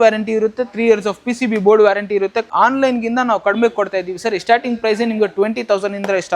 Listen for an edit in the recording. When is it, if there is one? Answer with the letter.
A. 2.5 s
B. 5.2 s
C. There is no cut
A